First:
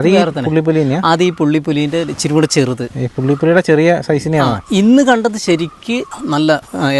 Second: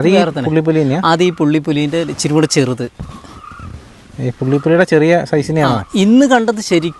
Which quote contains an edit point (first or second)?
first